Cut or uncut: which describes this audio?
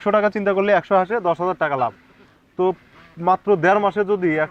uncut